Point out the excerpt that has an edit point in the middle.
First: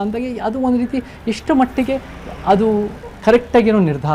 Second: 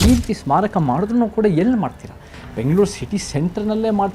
second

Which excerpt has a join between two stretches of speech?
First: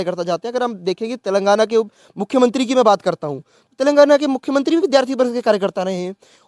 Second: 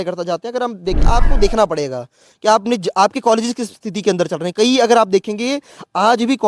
second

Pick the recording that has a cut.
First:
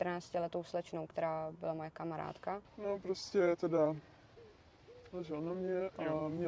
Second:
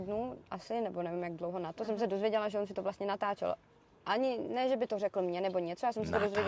first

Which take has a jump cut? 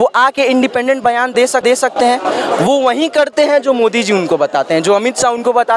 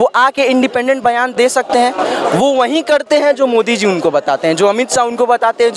second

